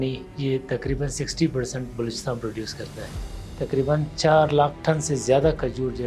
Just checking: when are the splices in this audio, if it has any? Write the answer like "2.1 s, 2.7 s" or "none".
3.2 s